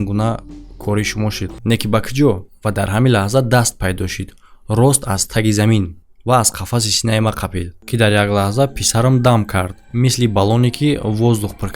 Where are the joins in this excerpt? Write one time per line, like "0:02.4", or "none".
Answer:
0:01.5
0:07.8